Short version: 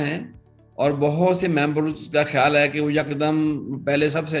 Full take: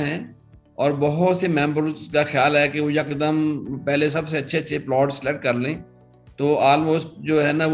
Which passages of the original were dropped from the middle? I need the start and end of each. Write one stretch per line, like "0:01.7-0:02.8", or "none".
none